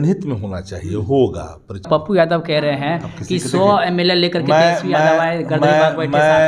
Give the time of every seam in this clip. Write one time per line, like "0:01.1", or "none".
0:01.9